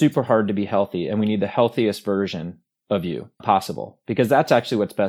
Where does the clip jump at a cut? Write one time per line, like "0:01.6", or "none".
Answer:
0:03.4